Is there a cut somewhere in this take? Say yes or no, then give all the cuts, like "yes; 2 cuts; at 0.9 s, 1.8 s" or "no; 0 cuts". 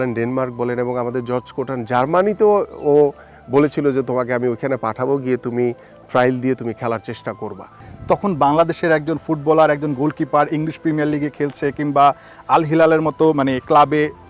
yes; 1 cut; at 7.9 s